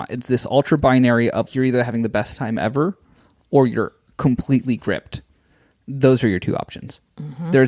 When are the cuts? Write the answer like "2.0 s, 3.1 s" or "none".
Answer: 1.5 s